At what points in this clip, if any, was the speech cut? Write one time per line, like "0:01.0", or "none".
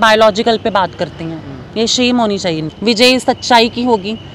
0:02.7